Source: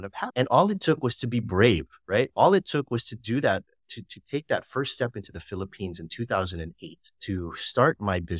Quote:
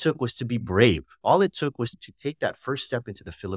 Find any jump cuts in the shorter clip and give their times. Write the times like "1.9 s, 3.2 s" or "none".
1.2 s, 2.0 s